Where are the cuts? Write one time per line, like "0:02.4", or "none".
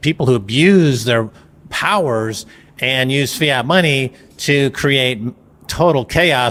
none